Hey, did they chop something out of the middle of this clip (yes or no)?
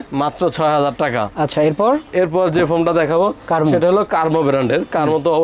no